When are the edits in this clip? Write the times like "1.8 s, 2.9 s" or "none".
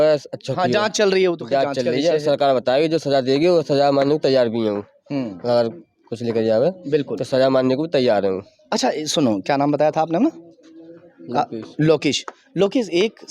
none

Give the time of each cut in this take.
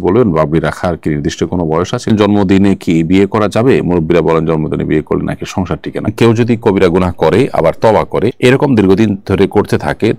2.1 s, 6.1 s

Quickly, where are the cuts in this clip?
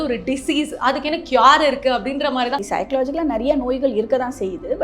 2.6 s

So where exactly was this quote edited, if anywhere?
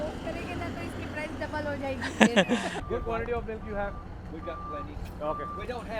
2.8 s

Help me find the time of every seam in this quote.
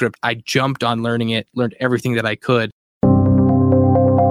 2.8 s

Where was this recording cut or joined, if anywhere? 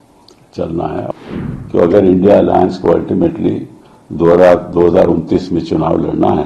1.1 s

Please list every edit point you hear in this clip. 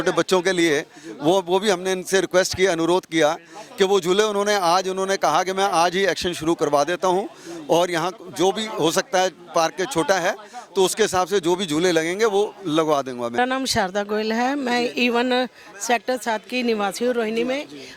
13.4 s

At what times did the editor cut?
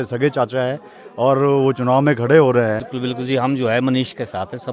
2.9 s

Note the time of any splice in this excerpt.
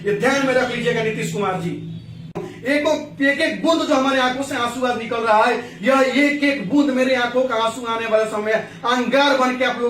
2.5 s

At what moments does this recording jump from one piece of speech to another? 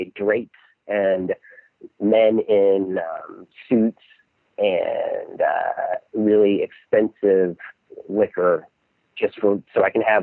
none

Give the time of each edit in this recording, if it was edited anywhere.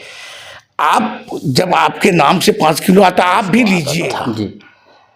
3.9 s

